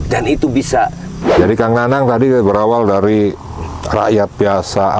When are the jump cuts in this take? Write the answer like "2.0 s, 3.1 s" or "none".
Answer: 1.4 s